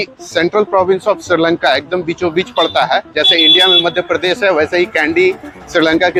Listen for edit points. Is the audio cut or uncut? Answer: uncut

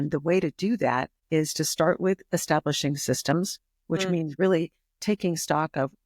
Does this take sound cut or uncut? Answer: cut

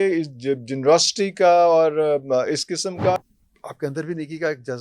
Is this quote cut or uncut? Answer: cut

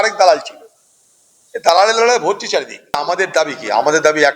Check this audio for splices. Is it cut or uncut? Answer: cut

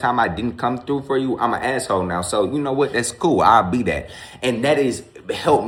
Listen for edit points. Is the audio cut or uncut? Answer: uncut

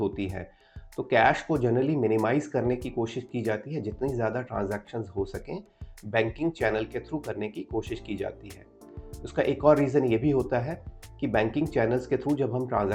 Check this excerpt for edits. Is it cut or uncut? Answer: uncut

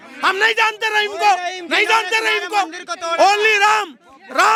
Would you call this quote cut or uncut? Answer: uncut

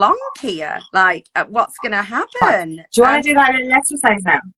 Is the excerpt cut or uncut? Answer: cut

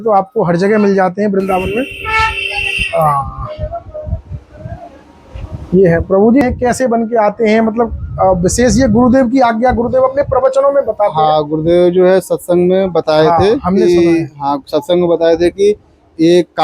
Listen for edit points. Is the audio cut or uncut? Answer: cut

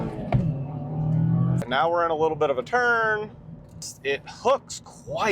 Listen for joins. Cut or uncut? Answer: cut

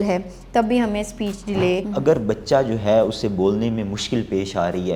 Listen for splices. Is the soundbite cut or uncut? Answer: cut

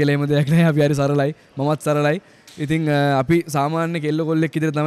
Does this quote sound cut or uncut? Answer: uncut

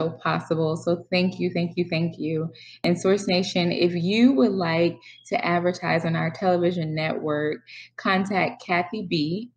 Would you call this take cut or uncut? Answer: cut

